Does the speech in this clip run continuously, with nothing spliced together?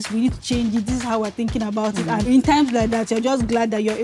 no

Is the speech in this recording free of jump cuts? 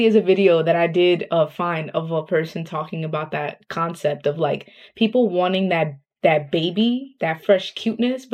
yes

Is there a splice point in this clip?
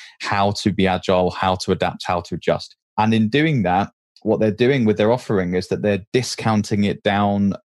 no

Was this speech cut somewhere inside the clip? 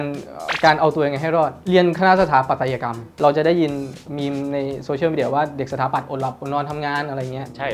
yes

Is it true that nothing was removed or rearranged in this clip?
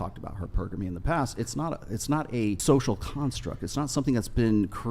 no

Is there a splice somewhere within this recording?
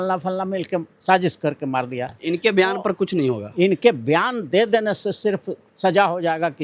yes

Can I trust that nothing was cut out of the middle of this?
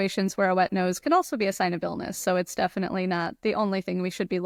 yes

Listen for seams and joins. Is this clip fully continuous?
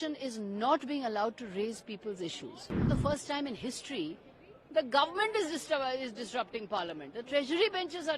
no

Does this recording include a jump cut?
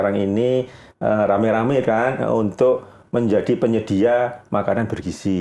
no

